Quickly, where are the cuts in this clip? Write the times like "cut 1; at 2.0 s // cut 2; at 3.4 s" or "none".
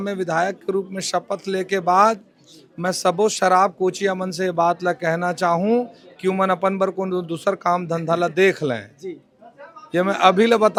none